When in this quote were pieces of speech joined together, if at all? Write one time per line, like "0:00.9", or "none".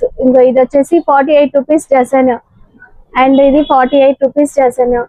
none

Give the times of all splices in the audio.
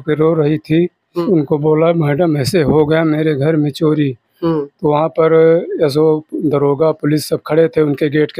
0:01.2

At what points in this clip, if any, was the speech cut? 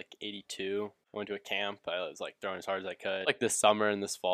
0:01.0
0:03.2

